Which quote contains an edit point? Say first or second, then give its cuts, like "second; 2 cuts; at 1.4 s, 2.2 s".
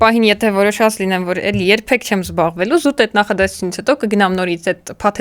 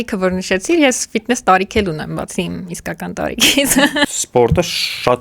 second; 1 cut; at 4.2 s